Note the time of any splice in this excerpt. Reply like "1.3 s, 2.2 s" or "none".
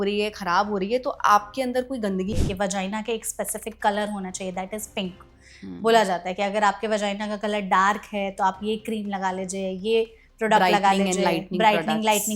2.3 s